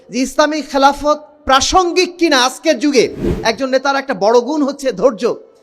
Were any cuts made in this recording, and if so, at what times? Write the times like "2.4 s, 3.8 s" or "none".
3.3 s